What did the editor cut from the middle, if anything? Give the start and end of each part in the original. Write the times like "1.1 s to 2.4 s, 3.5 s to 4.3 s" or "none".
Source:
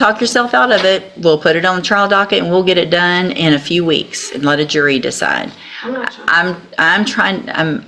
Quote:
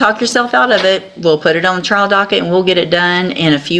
none